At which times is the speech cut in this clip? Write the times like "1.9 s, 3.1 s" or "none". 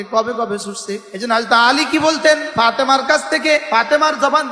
1.1 s, 2.5 s, 3.7 s